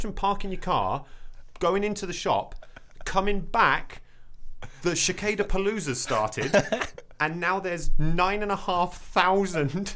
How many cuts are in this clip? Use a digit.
0